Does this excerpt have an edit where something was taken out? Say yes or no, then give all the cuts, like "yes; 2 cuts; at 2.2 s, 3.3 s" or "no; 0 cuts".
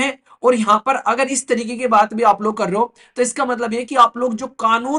no; 0 cuts